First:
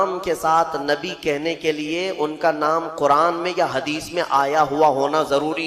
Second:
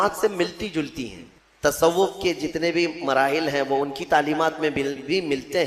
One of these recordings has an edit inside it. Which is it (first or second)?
second